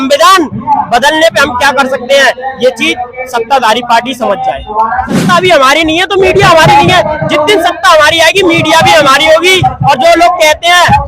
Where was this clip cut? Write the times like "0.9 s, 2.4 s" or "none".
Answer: 5.2 s